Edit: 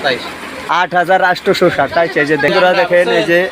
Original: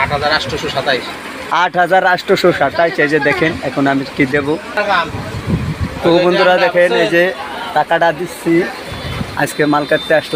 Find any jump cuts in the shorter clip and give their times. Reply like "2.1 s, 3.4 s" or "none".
2.5 s